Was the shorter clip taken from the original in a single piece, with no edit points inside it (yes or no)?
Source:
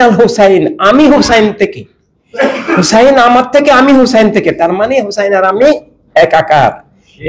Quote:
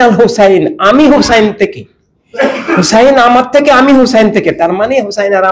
yes